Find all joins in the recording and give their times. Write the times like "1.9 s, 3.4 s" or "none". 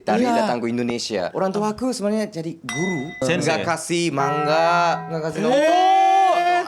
1.3 s, 3.2 s